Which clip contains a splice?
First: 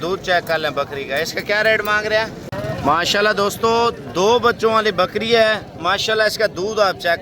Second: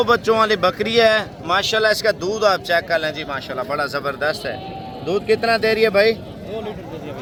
first; 1 cut; at 2.5 s

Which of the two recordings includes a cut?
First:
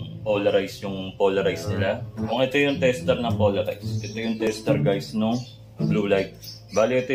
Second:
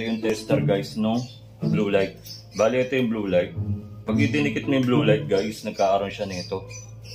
first; 1 cut; at 2.2 s

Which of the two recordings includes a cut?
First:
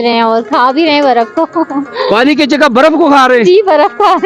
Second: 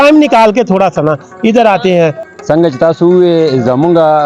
second; 1 cut; at 2.3 s

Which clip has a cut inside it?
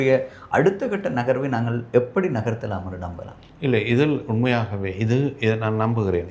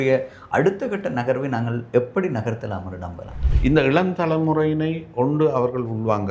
second; 1 cut; at 3.4 s

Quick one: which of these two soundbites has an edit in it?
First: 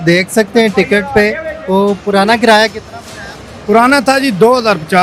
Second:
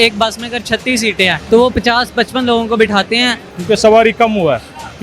second; 2 cuts; at 1.4 s, 3.5 s

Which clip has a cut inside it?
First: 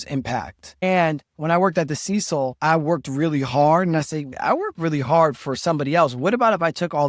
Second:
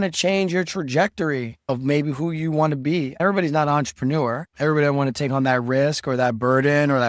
second; 1 cut; at 3.2 s

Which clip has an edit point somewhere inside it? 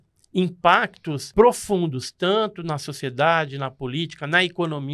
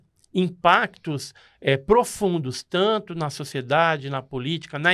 first; 1 cut; at 1.3 s

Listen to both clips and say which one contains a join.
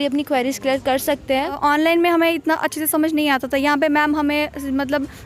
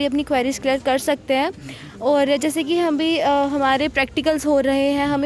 first; 1 cut; at 1.6 s

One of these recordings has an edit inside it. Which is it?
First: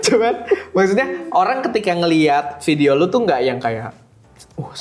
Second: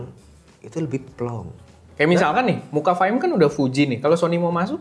second; 1 cut; at 1.8 s

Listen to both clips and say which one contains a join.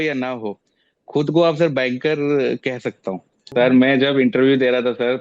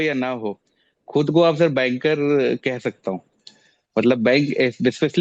first; 1 cut; at 3.5 s

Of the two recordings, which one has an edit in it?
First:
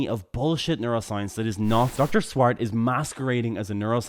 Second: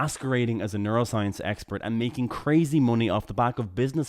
first; 1 cut; at 1.9 s

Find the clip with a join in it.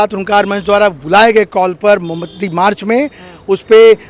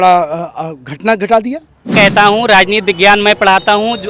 second; 1 cut; at 1.9 s

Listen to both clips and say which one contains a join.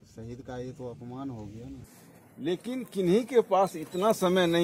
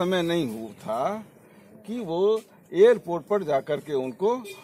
first; 1 cut; at 2.3 s

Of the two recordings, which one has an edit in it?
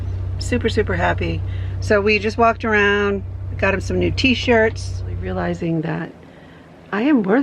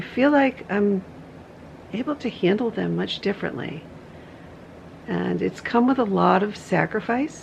first; 1 cut; at 5.2 s

